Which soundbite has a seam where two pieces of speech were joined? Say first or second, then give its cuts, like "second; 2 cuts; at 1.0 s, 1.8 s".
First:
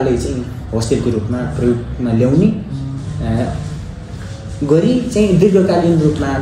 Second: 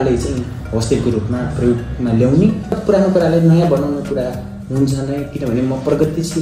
second; 1 cut; at 2.8 s